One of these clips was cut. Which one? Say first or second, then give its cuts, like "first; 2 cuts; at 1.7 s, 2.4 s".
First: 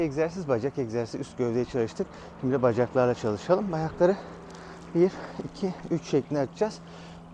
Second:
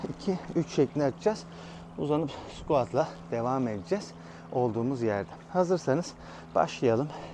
second; 1 cut; at 5.4 s